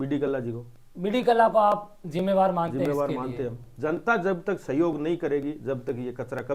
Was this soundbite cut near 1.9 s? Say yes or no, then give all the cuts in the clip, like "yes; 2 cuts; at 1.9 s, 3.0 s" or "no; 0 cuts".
no; 1 cut; at 3.7 s